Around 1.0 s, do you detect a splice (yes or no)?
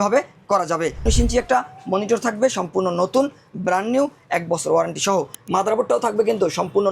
yes